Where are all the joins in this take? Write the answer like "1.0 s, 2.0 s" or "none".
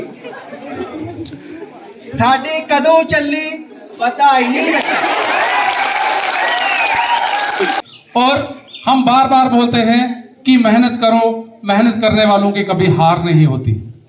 7.8 s